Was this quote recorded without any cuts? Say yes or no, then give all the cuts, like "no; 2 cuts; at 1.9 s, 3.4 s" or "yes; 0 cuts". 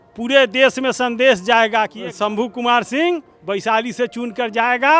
no; 1 cut; at 2.0 s